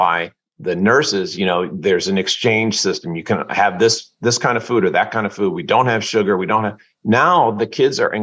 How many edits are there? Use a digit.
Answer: 0